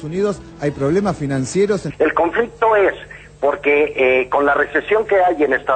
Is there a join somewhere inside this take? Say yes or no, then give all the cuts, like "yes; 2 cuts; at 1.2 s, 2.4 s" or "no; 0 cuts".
yes; 1 cut; at 1.8 s